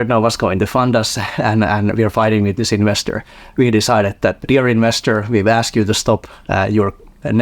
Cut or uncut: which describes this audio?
cut